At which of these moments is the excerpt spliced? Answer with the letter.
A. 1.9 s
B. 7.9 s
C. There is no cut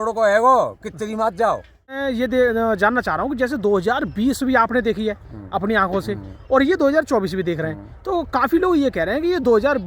A